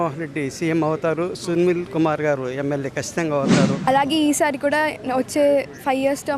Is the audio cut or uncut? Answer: cut